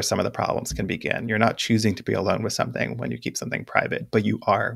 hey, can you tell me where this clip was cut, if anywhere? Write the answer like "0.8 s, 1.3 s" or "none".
none